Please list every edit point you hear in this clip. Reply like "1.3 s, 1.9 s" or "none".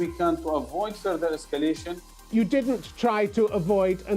2.1 s